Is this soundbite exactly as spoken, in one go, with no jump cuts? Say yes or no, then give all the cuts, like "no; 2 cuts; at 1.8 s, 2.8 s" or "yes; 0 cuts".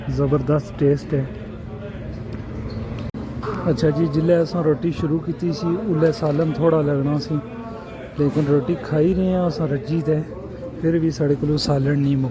no; 1 cut; at 3.1 s